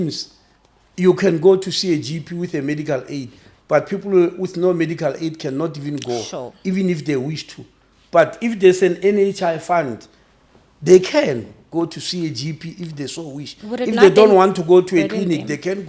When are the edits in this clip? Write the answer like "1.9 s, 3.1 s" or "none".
none